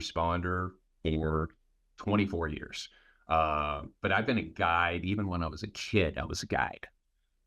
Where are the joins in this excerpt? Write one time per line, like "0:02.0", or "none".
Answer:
none